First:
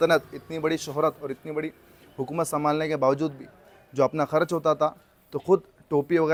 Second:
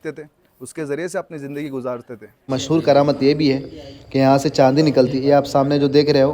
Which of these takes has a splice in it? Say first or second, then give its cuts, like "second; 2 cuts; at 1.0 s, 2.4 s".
second; 1 cut; at 2.5 s